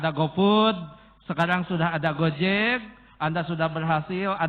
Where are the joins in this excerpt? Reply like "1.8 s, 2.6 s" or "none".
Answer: none